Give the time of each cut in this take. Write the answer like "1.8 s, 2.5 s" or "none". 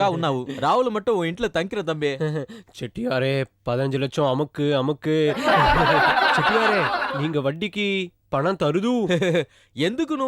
none